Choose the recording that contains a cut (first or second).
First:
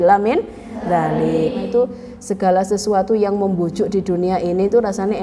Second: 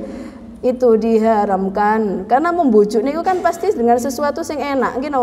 first